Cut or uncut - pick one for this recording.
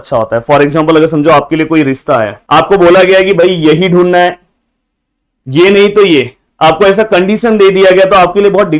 cut